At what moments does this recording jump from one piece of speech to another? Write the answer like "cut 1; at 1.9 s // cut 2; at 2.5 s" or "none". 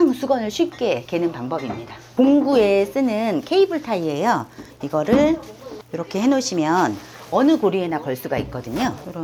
cut 1; at 2.0 s